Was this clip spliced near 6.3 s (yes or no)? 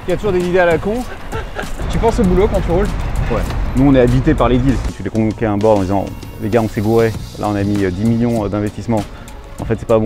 no